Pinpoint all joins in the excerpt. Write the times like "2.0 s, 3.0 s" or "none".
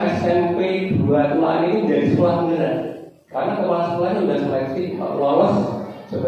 none